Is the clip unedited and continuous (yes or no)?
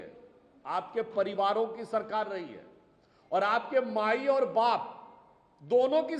yes